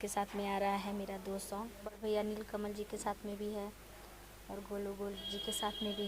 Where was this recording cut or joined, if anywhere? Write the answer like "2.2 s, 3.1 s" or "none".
2.0 s